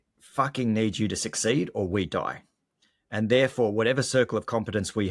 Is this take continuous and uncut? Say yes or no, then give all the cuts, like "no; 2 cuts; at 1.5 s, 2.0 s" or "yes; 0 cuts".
yes; 0 cuts